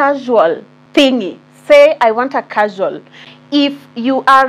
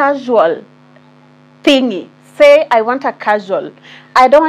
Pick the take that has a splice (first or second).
first